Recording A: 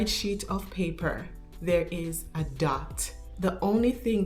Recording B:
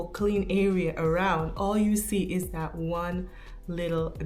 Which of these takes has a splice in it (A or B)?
A